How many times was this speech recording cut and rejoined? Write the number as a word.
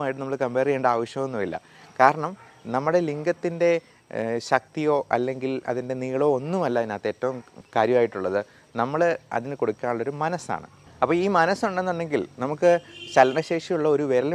zero